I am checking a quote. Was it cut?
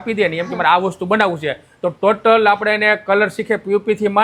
no; 0 cuts

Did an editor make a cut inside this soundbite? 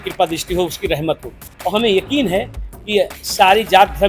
no; 0 cuts

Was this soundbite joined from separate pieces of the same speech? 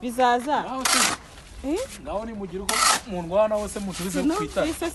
no; 0 cuts

